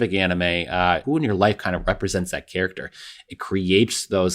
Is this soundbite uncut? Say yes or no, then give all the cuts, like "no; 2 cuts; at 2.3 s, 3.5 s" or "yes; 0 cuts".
no; 1 cut; at 1.0 s